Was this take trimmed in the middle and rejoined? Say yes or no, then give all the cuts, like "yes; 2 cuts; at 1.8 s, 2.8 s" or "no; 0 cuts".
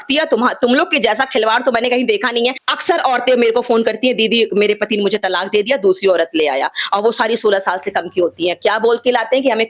yes; 1 cut; at 2.7 s